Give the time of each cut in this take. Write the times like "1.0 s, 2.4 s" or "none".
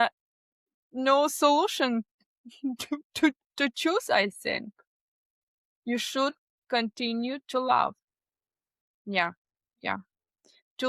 none